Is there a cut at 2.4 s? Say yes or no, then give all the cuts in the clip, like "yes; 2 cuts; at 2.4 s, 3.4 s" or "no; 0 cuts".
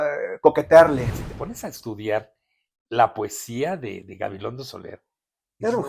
no; 1 cut; at 1.1 s